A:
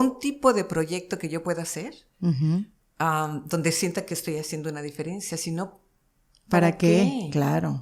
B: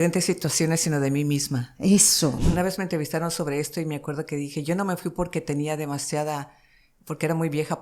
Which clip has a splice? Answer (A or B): B